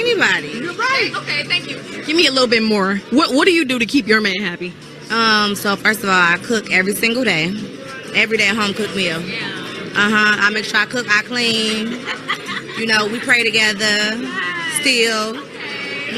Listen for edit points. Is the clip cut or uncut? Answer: cut